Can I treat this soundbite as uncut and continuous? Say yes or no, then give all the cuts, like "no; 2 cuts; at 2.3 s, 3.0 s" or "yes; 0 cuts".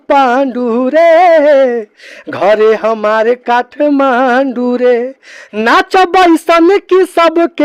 yes; 0 cuts